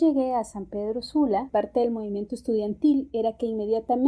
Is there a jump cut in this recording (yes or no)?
yes